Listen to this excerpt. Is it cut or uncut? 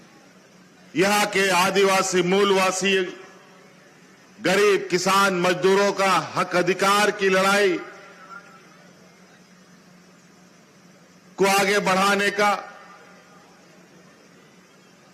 uncut